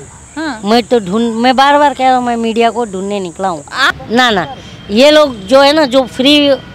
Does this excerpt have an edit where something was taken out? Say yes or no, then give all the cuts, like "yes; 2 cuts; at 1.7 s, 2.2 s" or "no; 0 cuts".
yes; 1 cut; at 3.8 s